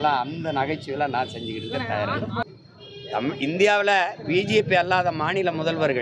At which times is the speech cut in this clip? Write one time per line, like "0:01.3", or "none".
0:02.4